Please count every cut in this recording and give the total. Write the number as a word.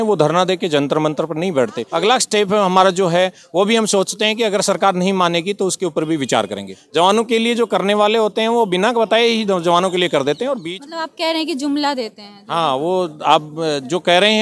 three